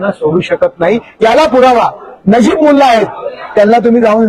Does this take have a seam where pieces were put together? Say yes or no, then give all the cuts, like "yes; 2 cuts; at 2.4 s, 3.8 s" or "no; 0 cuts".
no; 0 cuts